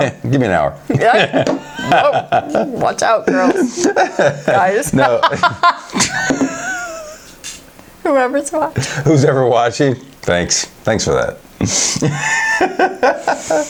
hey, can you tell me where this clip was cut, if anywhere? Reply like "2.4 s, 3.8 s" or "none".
none